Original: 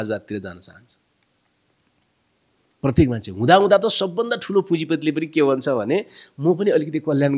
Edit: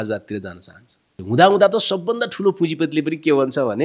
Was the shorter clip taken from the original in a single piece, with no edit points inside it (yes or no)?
no